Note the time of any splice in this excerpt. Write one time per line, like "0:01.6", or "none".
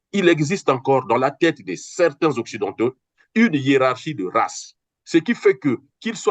none